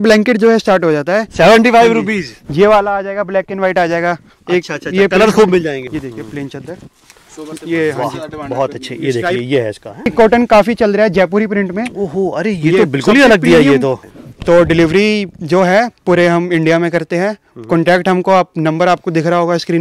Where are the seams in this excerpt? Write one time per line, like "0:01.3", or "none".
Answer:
0:05.8
0:10.1
0:14.0